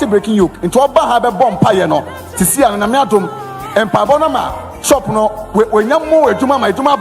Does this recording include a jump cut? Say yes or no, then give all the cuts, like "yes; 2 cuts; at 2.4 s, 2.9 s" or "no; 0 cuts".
no; 0 cuts